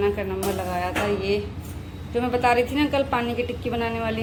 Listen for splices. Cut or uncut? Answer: uncut